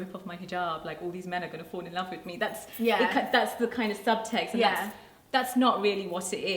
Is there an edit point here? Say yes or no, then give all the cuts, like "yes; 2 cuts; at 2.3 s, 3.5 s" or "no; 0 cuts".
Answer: no; 0 cuts